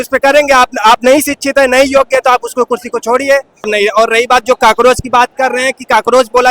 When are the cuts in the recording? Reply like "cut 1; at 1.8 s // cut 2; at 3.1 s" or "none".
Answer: cut 1; at 3.6 s